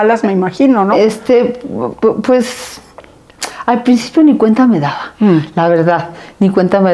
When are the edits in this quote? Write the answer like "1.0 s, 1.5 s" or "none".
none

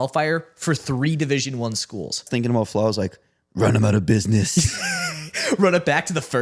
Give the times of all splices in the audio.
2.3 s

